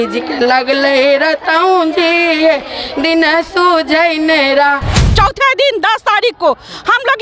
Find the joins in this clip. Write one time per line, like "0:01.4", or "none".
0:05.0